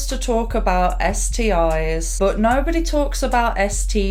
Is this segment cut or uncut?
uncut